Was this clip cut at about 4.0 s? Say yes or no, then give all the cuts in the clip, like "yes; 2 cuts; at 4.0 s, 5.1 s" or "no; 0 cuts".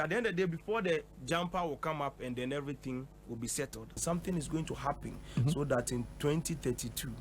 yes; 1 cut; at 4.0 s